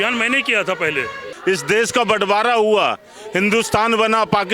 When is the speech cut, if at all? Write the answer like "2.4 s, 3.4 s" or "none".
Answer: 1.3 s